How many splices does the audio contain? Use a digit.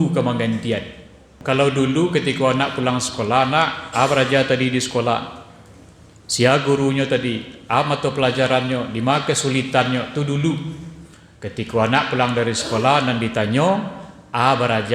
1